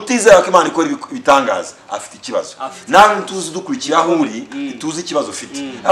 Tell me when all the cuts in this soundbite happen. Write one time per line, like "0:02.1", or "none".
none